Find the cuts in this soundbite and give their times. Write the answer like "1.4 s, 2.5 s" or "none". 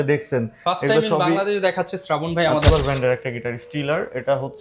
2.7 s